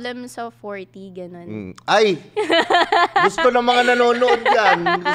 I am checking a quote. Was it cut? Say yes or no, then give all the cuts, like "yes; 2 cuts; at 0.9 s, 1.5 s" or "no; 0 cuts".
no; 0 cuts